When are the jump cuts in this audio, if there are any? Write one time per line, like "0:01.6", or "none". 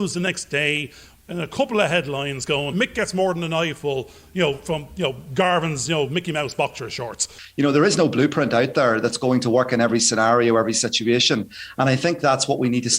0:02.7
0:07.4